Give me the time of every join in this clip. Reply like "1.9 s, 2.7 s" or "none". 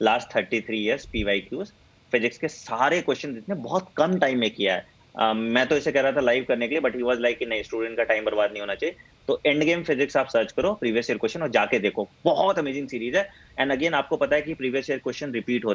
none